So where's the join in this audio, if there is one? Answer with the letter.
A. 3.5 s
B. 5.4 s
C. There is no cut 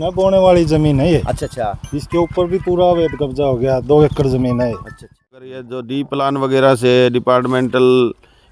B